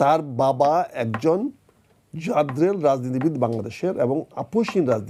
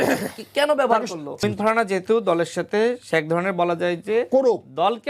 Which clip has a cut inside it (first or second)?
second